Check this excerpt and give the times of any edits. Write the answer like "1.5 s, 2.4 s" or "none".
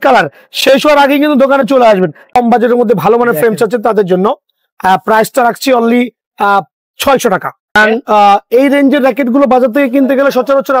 2.2 s, 7.8 s